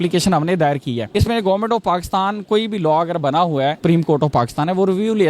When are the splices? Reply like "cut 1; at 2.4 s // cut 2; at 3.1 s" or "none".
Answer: cut 1; at 1.0 s // cut 2; at 3.8 s